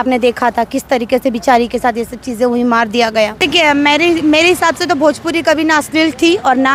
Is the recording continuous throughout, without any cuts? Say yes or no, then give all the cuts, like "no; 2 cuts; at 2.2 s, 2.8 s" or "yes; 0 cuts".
no; 1 cut; at 3.4 s